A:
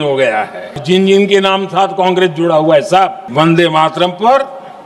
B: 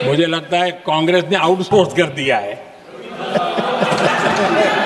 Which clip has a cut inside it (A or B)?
A